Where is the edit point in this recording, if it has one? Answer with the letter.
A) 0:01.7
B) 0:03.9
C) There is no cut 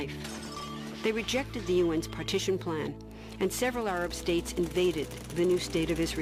C